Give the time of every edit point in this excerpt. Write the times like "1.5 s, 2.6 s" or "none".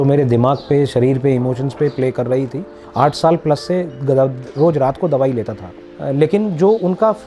5.9 s